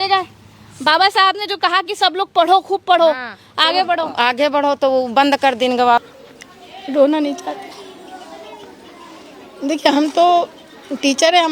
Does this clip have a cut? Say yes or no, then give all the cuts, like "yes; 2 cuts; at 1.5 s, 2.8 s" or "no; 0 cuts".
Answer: yes; 1 cut; at 6.0 s